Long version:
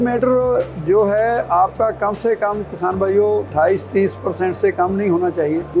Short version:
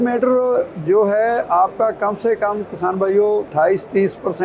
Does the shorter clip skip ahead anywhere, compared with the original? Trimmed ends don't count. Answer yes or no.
no